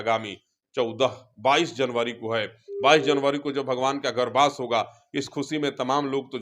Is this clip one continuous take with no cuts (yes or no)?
yes